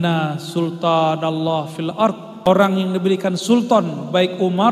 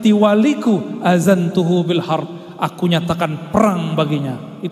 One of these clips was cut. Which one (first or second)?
first